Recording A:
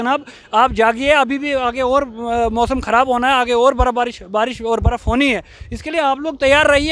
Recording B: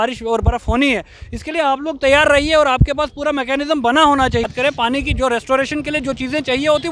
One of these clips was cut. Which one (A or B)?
B